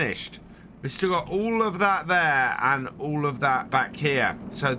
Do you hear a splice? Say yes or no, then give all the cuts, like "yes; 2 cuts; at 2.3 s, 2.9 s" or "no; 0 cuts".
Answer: yes; 1 cut; at 3.7 s